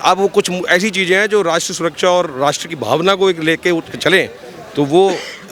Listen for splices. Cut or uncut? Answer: uncut